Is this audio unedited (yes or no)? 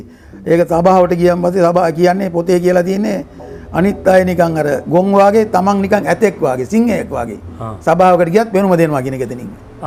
yes